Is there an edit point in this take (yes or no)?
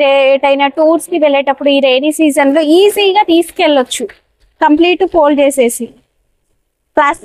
no